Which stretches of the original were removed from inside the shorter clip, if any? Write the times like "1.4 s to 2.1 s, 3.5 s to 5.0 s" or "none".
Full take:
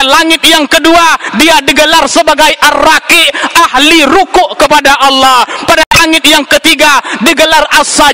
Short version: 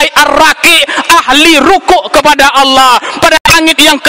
none